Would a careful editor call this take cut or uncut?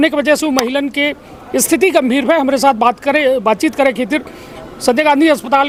uncut